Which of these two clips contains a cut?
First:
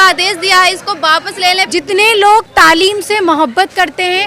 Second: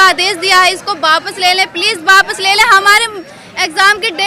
first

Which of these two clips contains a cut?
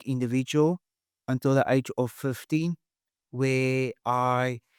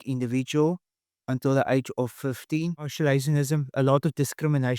second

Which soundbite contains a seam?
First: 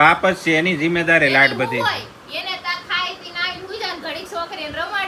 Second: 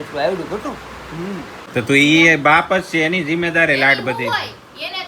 second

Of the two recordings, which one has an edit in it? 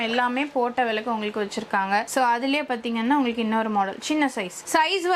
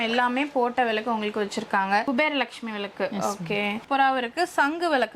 second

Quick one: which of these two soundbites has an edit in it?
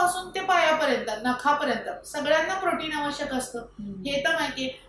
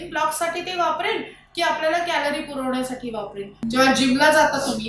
second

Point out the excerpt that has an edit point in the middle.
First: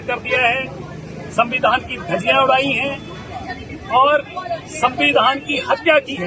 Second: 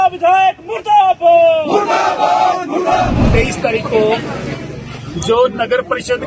second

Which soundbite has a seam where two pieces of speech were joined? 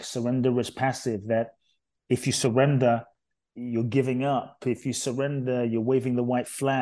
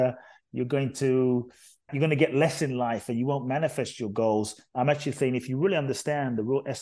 second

